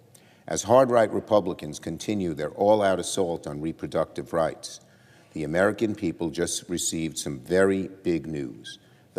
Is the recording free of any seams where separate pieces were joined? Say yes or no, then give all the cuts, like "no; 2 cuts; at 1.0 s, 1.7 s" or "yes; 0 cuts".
no; 2 cuts; at 1.9 s, 7.0 s